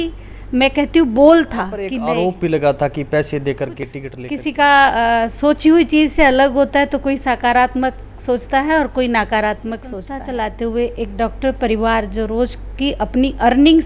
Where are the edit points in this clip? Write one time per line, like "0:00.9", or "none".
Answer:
0:01.8
0:03.8
0:10.1